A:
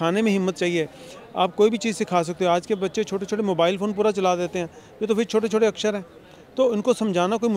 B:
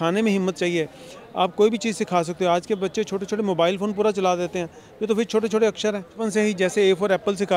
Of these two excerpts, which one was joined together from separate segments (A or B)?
B